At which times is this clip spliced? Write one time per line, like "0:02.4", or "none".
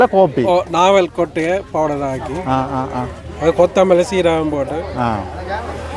none

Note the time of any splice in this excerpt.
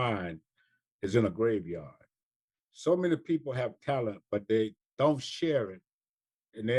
none

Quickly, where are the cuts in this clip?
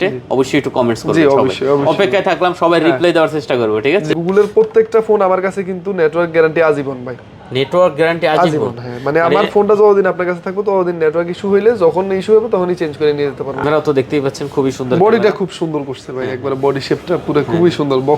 0:04.1
0:13.6

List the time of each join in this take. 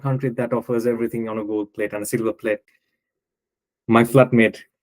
0:02.7

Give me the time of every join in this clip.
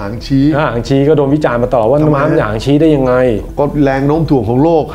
none

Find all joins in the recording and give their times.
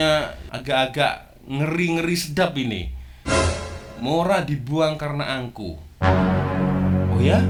none

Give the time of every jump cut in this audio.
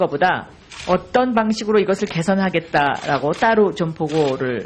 0:03.5

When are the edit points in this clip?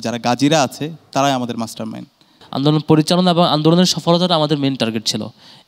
0:02.4

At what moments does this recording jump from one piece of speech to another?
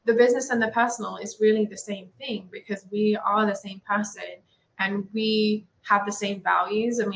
none

